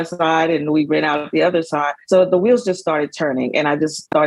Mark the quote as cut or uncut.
cut